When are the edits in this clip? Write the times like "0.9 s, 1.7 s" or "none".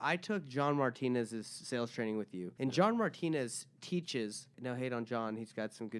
2.5 s, 4.5 s